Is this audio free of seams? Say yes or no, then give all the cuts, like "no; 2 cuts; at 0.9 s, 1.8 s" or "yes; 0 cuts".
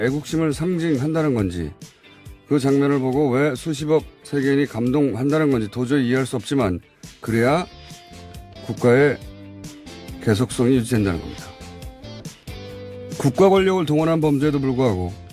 no; 1 cut; at 12.3 s